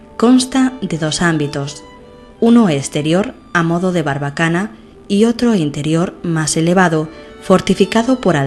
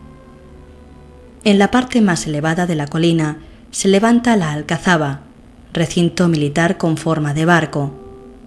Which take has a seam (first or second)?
first